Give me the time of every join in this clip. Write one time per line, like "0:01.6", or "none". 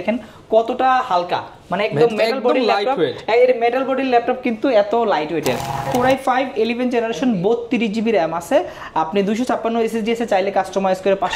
0:05.9